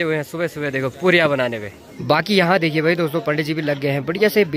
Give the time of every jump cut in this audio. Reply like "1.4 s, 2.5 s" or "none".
1.9 s